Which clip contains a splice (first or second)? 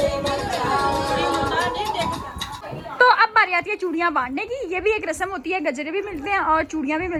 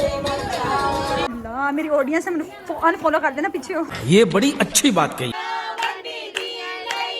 second